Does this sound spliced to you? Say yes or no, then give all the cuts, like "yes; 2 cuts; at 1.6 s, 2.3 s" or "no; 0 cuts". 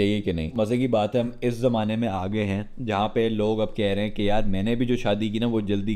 no; 0 cuts